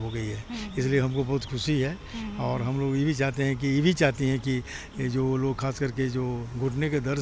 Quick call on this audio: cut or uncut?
uncut